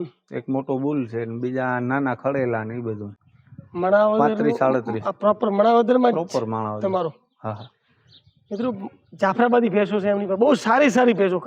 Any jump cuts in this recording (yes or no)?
no